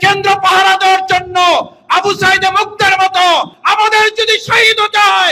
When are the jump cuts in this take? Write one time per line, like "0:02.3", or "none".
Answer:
0:03.6